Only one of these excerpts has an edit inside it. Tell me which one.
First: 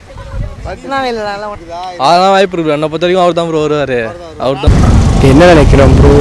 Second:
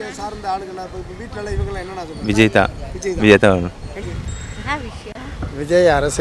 first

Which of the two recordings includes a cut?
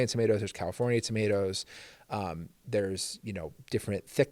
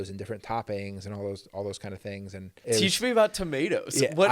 second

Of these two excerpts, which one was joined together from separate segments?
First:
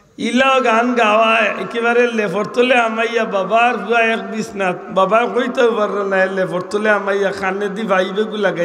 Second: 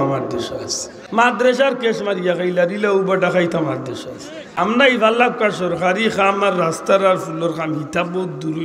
second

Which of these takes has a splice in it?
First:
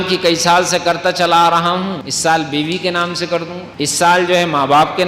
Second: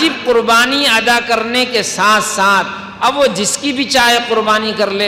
first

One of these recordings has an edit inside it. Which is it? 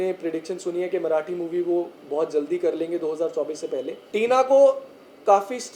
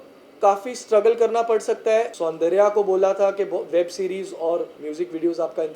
second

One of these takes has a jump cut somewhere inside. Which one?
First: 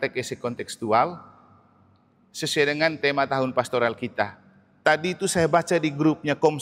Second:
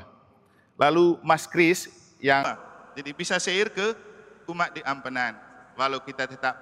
second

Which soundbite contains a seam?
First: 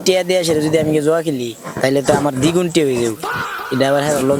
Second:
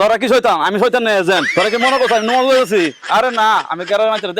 second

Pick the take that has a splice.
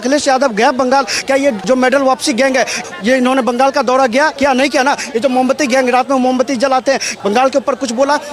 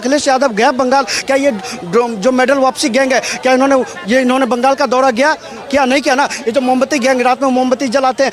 first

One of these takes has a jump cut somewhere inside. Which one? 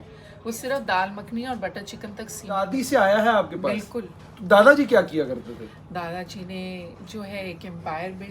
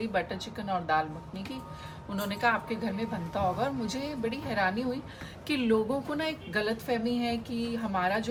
first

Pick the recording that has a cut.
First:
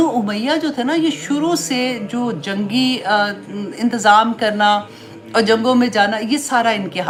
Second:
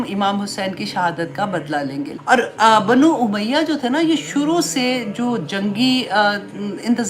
second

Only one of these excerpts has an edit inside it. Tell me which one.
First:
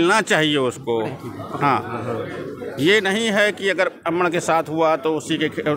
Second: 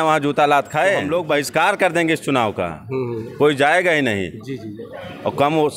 second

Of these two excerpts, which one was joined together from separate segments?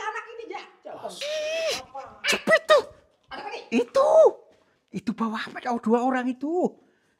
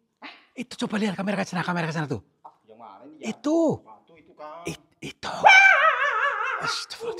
first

